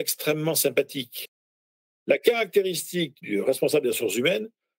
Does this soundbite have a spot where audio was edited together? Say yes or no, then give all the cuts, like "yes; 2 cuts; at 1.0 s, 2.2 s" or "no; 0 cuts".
no; 0 cuts